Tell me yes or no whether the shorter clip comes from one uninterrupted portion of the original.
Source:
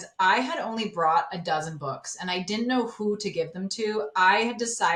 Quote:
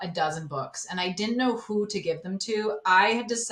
yes